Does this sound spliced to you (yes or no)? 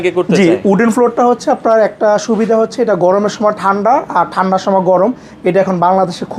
no